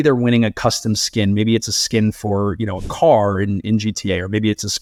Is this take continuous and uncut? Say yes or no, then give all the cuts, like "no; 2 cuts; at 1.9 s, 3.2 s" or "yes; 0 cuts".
yes; 0 cuts